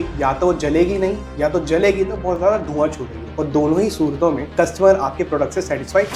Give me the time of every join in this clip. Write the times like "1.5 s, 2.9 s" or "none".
none